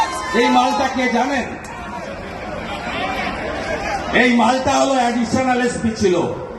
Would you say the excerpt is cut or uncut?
uncut